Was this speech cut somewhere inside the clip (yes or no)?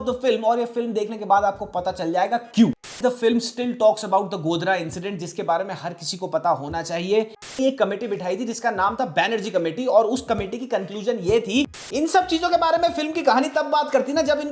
yes